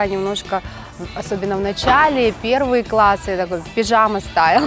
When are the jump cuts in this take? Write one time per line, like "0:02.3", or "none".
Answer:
none